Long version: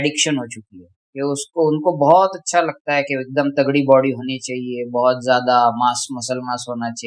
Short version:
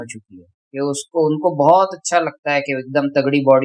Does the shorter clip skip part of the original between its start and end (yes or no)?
no